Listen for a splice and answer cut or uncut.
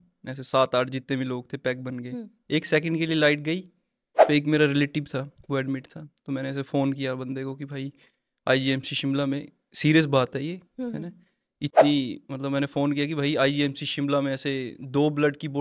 cut